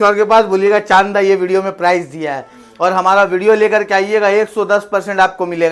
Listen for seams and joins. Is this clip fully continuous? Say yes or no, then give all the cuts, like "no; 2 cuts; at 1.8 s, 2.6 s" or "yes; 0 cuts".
yes; 0 cuts